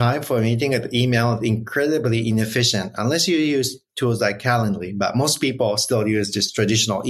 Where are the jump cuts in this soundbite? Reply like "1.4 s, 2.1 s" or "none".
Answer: none